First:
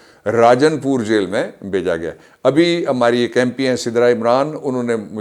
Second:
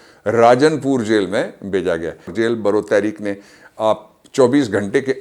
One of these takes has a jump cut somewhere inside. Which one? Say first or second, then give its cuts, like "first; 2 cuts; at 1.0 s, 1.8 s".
second; 1 cut; at 2.3 s